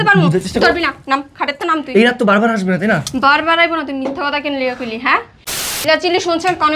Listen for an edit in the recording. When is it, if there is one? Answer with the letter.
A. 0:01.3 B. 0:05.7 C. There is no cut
B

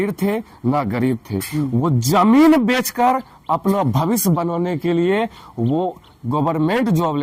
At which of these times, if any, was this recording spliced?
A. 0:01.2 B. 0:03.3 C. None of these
C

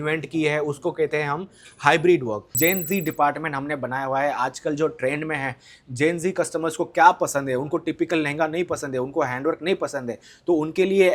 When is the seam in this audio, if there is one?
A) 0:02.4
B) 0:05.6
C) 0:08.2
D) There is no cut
A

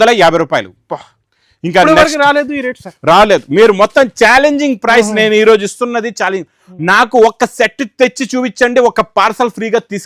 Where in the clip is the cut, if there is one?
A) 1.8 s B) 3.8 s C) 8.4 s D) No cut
D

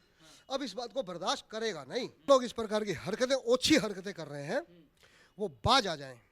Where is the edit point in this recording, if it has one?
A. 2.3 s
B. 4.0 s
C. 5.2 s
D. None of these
A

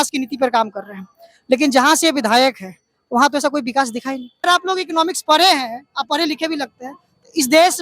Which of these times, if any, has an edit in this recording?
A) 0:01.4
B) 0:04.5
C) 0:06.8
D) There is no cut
B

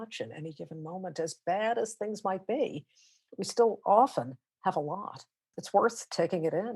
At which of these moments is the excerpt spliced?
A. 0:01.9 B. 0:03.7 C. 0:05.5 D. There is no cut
C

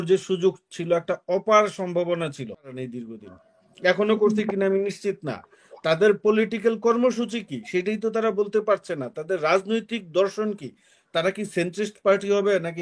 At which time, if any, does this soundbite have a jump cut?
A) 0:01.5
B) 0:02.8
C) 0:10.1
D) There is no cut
B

